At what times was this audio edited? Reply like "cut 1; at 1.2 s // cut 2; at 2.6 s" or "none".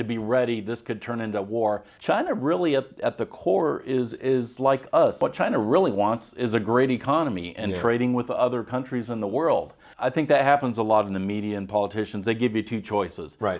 cut 1; at 1.9 s // cut 2; at 5.2 s // cut 3; at 9.8 s